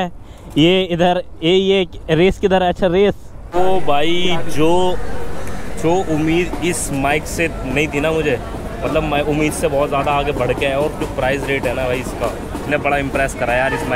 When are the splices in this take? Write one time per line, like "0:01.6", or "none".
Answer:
0:03.3
0:12.6